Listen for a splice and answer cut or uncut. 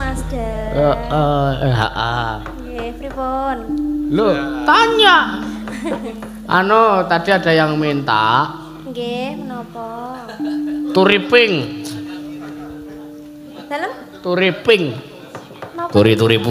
uncut